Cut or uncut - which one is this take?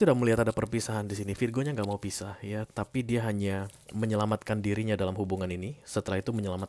uncut